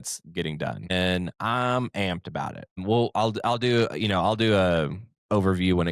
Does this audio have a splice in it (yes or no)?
yes